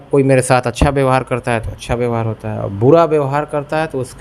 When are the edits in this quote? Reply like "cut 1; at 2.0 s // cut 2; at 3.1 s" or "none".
none